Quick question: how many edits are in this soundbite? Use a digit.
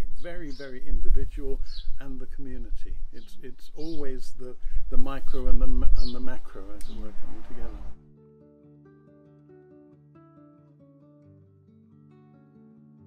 1